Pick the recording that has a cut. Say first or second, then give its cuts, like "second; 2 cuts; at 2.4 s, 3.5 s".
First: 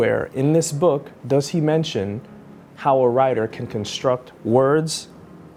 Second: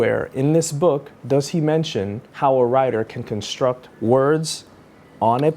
second; 1 cut; at 2.2 s